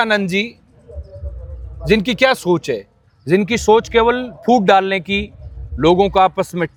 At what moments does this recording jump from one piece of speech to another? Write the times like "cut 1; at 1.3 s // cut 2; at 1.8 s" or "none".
none